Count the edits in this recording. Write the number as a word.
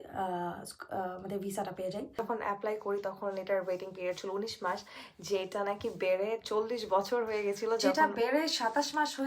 one